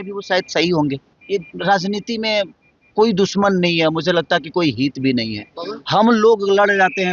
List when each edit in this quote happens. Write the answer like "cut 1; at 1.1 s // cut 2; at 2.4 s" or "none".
cut 1; at 1.1 s